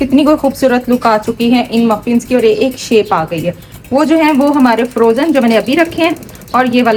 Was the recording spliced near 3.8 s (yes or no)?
no